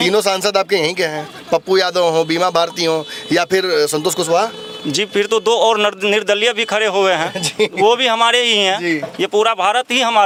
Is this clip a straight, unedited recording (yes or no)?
yes